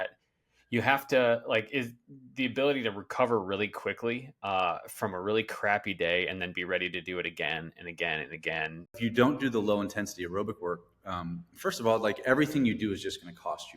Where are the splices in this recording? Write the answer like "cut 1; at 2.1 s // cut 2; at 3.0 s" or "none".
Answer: cut 1; at 9.0 s